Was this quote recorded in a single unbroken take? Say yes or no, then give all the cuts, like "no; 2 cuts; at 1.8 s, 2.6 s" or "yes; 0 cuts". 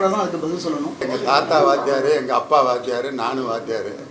no; 1 cut; at 1.0 s